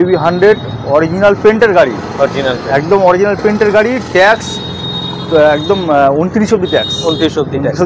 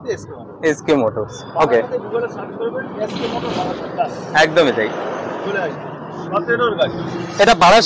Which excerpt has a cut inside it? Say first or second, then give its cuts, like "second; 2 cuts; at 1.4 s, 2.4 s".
second; 1 cut; at 6.2 s